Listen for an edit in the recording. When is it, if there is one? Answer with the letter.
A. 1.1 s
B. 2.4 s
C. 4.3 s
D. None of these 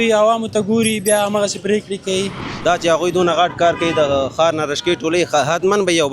B